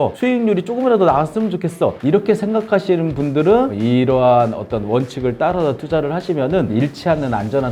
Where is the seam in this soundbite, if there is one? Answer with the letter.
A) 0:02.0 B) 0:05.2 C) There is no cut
C